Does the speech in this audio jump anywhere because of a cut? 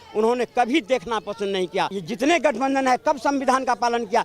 yes; 1 cut; at 2.0 s

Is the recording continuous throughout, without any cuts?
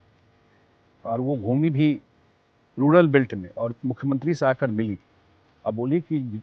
yes; 0 cuts

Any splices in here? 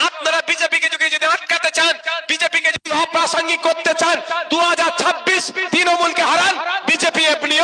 no; 0 cuts

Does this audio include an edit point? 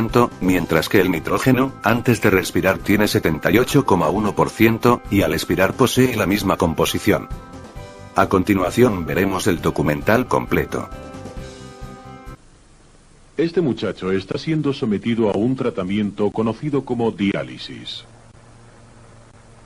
no; 0 cuts

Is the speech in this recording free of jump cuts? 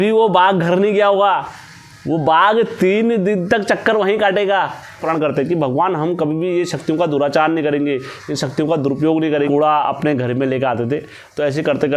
no; 2 cuts; at 5.0 s, 9.5 s

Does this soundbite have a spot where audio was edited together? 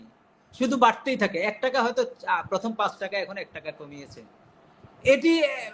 no; 0 cuts

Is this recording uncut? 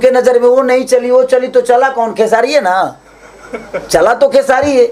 yes; 0 cuts

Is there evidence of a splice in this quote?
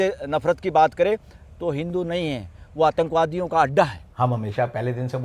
yes; 1 cut; at 4.0 s

